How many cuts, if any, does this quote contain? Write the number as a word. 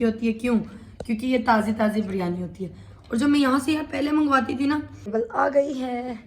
one